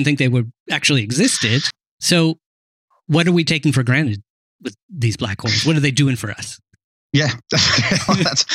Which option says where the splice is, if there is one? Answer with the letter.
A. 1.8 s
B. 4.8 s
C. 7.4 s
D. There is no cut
A